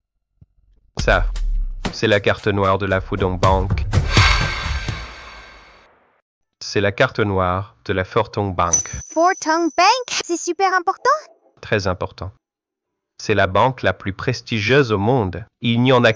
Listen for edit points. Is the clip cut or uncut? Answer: uncut